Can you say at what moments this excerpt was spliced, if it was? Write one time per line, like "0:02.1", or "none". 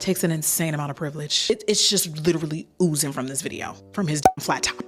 none